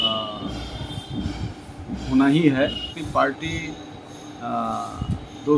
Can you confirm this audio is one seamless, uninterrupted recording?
no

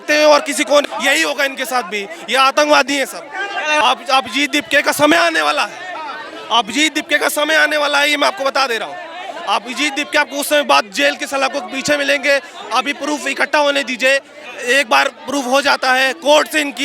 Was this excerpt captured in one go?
no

